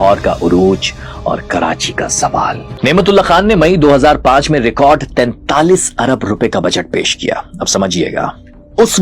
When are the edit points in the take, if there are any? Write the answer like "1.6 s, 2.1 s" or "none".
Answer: 2.7 s